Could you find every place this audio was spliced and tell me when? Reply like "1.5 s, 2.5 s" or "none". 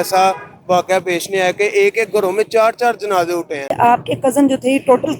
3.7 s